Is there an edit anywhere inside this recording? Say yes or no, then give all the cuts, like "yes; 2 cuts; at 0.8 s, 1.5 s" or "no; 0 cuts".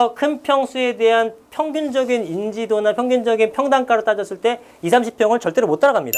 no; 0 cuts